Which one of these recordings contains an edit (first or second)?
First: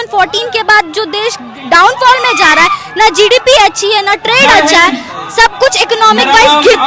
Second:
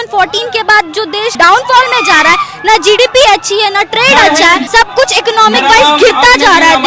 second